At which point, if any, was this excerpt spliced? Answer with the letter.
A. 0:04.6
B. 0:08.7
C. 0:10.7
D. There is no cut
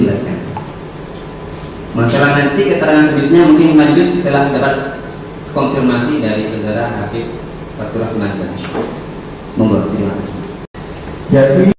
C